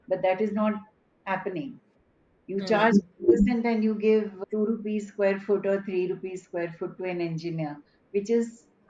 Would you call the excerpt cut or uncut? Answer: uncut